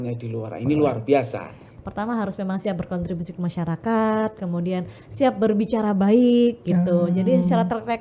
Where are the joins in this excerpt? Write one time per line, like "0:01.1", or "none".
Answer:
0:01.7